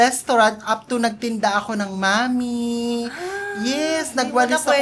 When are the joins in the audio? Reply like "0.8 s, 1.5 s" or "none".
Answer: none